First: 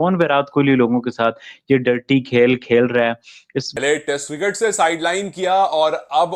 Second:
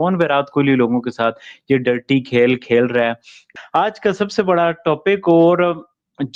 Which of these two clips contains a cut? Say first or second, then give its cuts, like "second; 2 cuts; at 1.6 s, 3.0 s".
first; 1 cut; at 3.6 s